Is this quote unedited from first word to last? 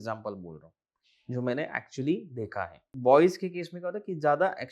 no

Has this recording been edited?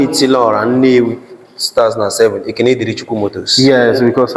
no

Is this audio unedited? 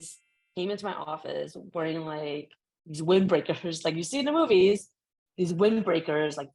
yes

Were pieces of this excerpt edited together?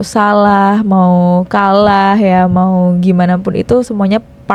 no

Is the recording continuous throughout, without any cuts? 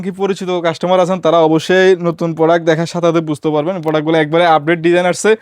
yes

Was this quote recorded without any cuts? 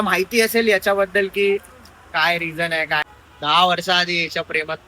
no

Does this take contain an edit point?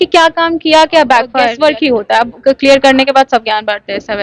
yes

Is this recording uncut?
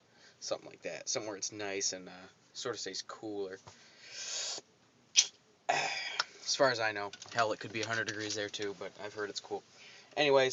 yes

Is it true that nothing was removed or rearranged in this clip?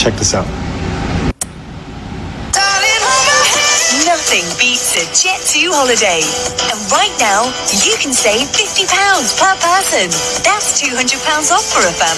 no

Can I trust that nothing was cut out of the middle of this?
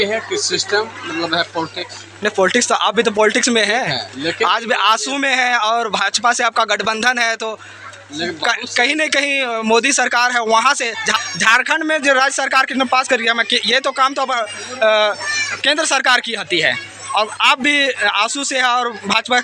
no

